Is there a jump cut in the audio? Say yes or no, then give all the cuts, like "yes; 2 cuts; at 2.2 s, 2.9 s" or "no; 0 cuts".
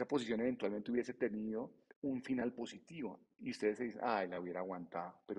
yes; 1 cut; at 1.8 s